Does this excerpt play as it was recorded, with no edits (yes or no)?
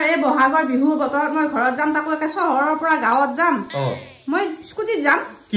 yes